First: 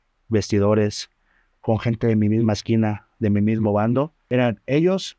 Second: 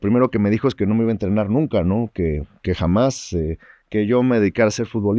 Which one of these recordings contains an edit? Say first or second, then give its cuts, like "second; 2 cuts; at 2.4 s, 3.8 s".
first; 1 cut; at 4.2 s